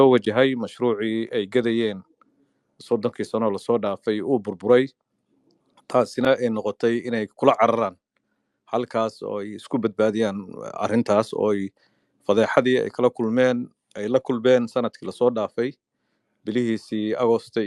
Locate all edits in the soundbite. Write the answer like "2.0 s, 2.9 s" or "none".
none